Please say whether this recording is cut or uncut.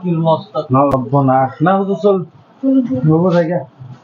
cut